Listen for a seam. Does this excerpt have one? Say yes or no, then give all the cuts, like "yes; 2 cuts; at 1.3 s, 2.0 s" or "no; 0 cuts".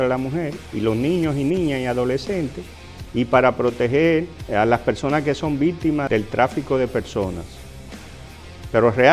no; 0 cuts